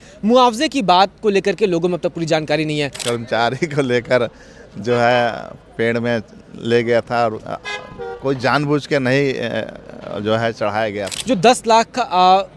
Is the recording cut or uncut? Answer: cut